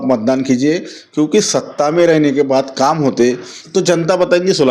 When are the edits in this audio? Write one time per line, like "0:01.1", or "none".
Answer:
0:03.5